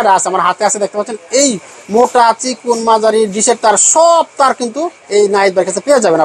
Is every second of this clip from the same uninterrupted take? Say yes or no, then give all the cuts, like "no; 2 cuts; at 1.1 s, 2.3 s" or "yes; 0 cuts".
yes; 0 cuts